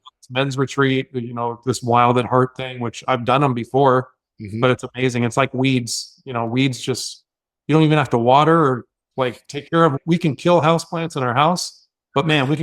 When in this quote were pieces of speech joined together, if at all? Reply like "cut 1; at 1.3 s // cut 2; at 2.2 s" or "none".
cut 1; at 10.0 s